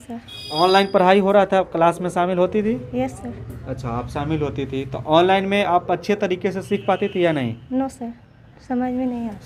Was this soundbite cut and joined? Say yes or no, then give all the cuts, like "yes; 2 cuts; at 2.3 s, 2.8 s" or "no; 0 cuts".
no; 0 cuts